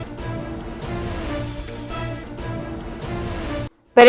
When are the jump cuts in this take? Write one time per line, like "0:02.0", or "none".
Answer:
none